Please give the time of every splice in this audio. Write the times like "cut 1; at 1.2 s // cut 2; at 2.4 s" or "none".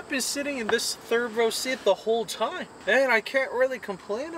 none